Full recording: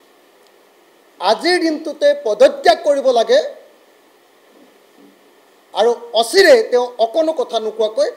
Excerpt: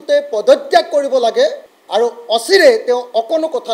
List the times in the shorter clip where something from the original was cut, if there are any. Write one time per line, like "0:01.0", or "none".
0:01.7